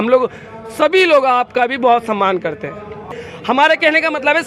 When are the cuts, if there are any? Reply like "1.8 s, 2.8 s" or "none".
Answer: 3.1 s